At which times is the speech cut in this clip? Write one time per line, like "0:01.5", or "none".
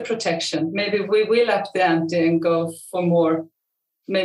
0:01.1